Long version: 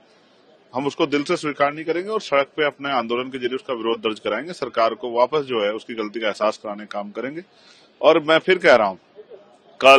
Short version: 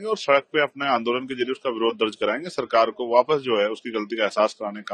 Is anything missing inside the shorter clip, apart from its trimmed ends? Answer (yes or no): no